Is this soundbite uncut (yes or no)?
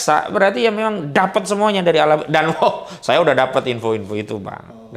yes